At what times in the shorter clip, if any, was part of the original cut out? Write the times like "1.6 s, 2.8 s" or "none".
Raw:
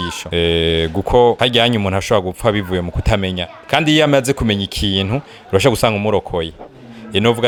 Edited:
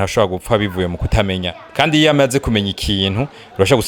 none